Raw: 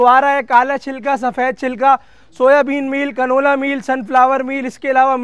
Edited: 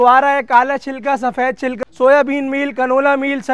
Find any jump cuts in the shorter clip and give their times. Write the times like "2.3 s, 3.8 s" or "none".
1.8 s